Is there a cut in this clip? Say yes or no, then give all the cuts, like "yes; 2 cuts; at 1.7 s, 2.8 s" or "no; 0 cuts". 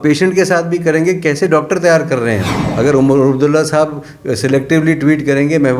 yes; 1 cut; at 2.6 s